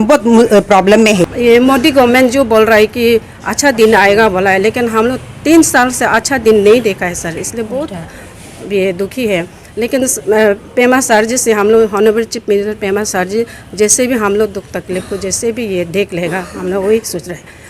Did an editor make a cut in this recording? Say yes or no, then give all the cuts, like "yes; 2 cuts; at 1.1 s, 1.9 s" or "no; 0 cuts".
yes; 1 cut; at 1.2 s